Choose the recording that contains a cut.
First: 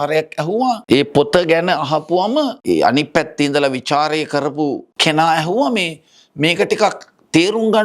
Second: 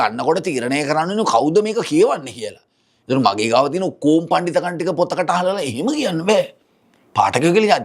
first; 3 cuts; at 0.8 s, 2.6 s, 4.9 s

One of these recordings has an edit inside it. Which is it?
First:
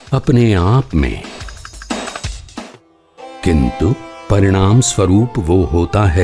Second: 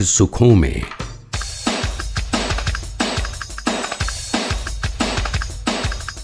second; 1 cut; at 3.1 s

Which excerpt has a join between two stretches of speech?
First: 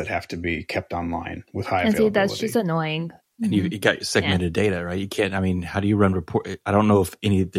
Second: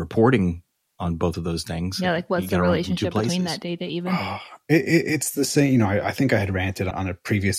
first; 1 cut; at 3.2 s

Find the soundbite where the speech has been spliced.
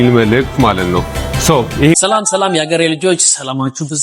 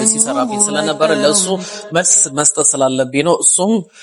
first; 1 cut; at 1.9 s

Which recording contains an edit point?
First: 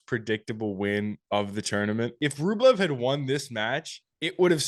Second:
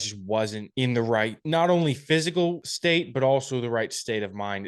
second; 2 cuts; at 0.9 s, 2.7 s

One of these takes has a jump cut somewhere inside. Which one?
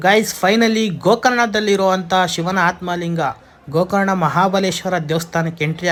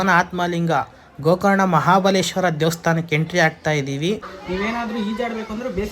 second; 1 cut; at 4.3 s

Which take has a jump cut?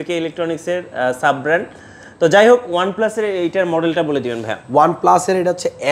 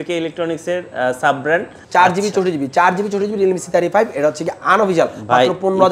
second; 1 cut; at 1.8 s

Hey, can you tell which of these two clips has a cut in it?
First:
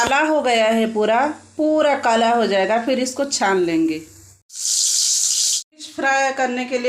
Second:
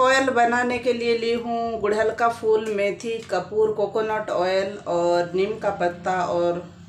first; 2 cuts; at 4.5 s, 5.6 s

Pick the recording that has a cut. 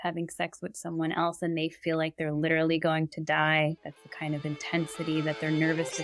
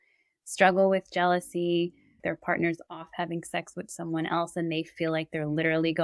second; 1 cut; at 2.2 s

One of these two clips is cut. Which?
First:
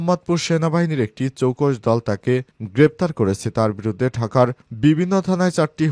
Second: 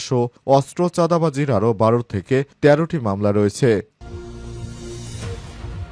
second; 1 cut; at 3.9 s

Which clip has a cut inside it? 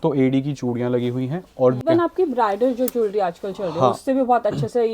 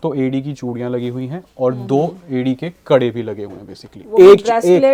first; 1 cut; at 1.8 s

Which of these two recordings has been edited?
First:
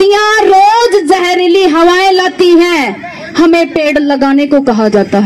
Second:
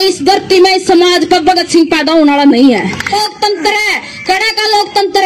second; 1 cut; at 3.1 s

